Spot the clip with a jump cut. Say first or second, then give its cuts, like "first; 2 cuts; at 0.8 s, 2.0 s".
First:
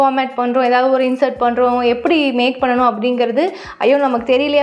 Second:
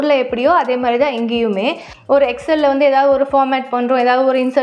second; 1 cut; at 1.9 s